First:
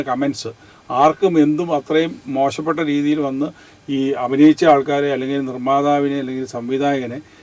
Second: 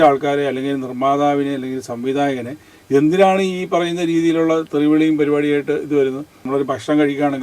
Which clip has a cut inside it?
second; 1 cut; at 6.3 s

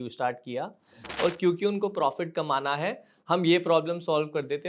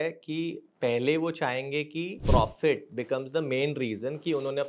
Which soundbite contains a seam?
second; 1 cut; at 2.1 s

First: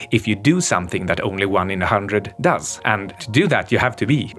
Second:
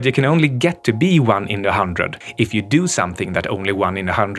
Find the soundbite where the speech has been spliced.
first; 1 cut; at 3.1 s

